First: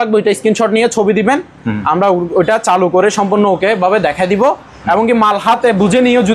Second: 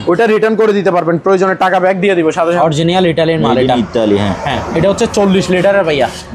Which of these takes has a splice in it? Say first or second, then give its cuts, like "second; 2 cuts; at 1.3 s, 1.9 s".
second; 1 cut; at 2.6 s